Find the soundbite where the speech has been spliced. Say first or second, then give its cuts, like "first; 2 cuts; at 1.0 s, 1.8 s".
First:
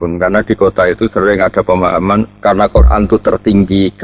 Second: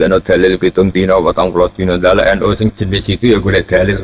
first; 1 cut; at 2.3 s